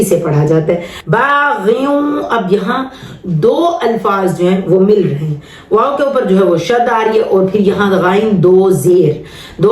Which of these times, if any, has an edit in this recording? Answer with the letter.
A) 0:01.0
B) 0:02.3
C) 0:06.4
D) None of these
A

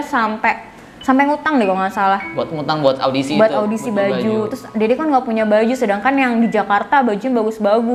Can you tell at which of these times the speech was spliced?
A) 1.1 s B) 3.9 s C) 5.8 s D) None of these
D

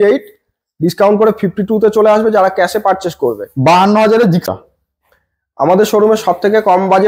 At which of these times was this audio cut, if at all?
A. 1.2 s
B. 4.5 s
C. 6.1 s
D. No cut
B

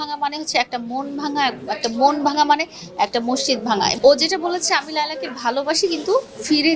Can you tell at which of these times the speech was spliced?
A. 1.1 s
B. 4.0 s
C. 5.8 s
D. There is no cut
B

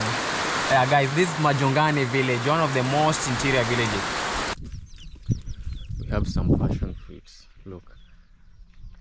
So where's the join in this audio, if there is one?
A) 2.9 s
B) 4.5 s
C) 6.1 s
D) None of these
B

